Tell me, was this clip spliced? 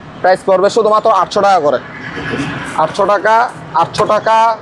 no; 0 cuts

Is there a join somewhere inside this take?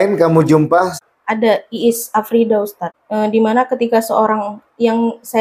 yes; 2 cuts; at 1.0 s, 2.9 s

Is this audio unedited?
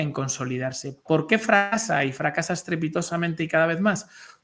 yes; 0 cuts

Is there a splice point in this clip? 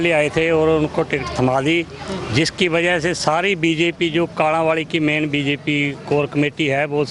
no; 0 cuts

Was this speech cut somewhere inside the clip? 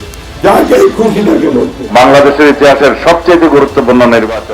yes; 1 cut; at 1.8 s

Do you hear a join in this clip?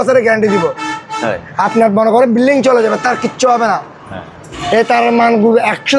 no; 0 cuts

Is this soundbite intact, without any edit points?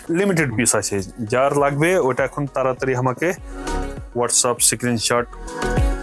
yes; 0 cuts

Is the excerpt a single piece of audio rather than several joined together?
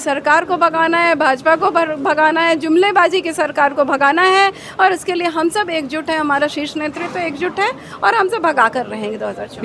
yes; 0 cuts

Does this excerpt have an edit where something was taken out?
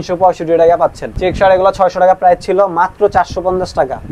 yes; 1 cut; at 1.1 s

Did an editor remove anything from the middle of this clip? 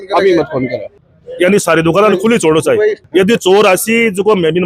yes; 2 cuts; at 0.9 s, 3.0 s

